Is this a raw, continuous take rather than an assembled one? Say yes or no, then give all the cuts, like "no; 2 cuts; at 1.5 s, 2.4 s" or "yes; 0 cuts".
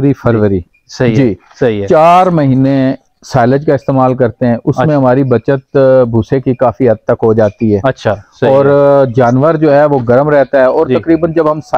yes; 0 cuts